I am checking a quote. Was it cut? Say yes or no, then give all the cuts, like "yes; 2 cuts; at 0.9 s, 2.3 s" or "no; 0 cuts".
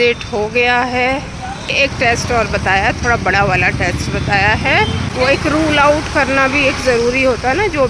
yes; 2 cuts; at 1.7 s, 5.0 s